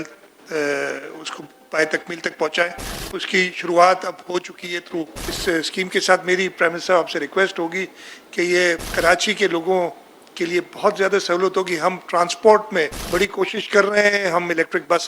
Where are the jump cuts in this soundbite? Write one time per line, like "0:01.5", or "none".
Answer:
0:05.2
0:08.8
0:13.0